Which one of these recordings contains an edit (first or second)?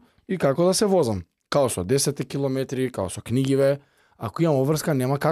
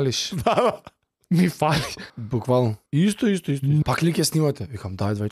second